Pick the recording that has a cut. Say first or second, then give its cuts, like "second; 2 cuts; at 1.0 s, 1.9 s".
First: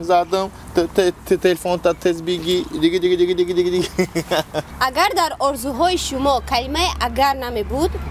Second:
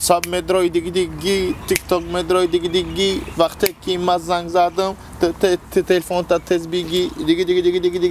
first; 1 cut; at 4.6 s